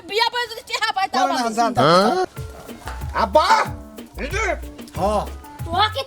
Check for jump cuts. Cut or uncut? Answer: cut